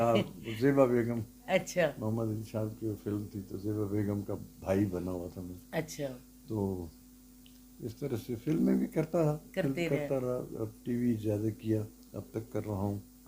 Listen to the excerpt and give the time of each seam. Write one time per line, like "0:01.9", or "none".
none